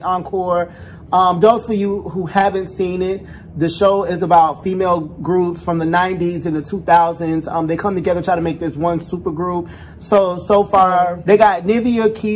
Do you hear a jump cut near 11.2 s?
yes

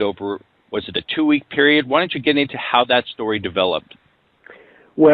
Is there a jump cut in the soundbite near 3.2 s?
no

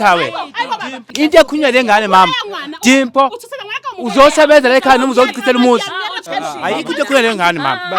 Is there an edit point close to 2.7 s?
no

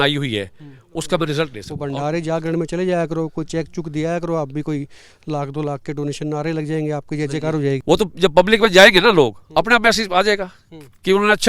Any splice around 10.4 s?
no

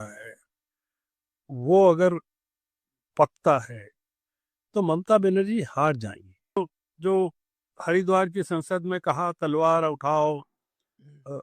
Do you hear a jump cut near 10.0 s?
no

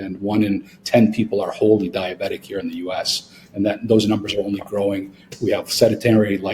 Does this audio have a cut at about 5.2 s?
yes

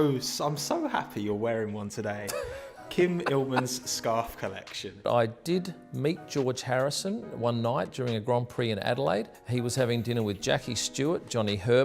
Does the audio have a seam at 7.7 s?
no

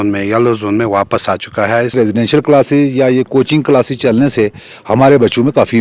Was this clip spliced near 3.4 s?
no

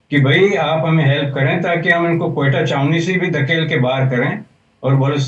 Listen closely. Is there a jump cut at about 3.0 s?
no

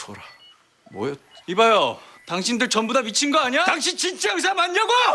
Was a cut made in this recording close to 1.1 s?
no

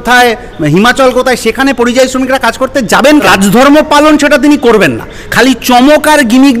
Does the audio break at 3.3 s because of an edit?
yes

